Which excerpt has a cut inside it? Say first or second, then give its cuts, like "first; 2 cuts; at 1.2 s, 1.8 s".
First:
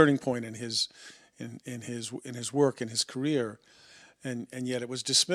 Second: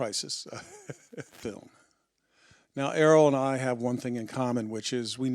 second; 1 cut; at 1.4 s